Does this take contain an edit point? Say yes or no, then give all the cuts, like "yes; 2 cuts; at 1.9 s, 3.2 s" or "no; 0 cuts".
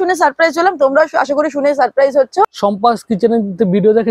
yes; 1 cut; at 2.5 s